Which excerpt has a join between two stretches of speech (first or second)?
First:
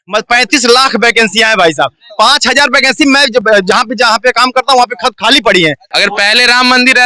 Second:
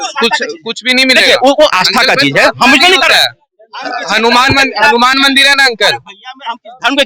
first